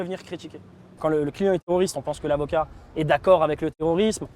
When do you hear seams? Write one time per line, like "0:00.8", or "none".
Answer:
0:01.0

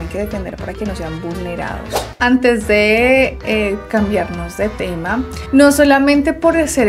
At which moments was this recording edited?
0:02.0

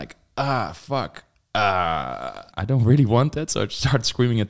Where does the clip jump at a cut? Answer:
0:02.5

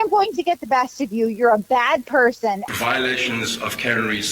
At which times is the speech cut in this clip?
0:02.7

